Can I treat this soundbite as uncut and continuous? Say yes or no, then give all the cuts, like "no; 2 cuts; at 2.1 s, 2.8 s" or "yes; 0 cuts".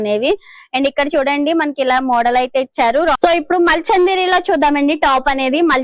no; 1 cut; at 3.2 s